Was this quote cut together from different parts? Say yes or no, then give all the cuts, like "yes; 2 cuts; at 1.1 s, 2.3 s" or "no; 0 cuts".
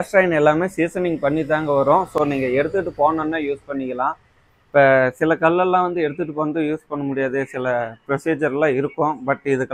no; 0 cuts